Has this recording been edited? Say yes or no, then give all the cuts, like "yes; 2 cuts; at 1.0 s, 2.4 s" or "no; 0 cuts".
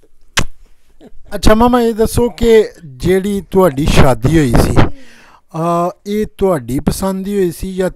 no; 0 cuts